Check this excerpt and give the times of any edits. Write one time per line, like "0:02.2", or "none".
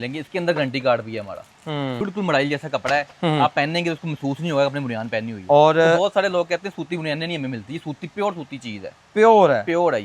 0:02.0

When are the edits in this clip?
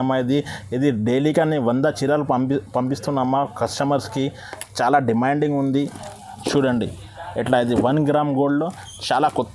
none

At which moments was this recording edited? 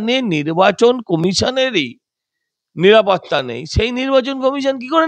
none

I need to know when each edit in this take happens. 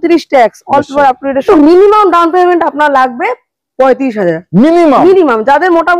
0:01.4

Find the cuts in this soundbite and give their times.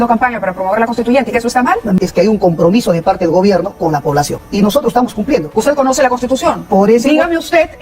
0:02.0
0:04.4
0:05.5

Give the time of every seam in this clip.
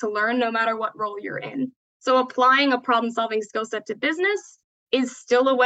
0:01.9

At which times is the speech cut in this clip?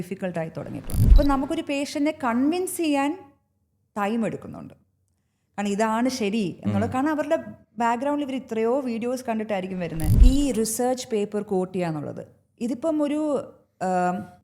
0:01.1
0:10.1

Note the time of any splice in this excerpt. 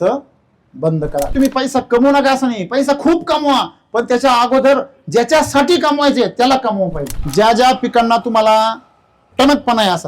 0:01.3
0:07.1

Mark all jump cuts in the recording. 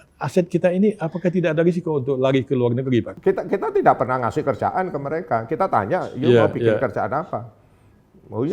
0:03.1

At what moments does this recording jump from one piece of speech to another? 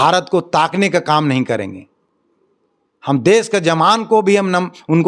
none

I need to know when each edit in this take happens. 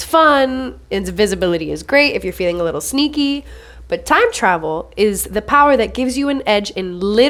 none

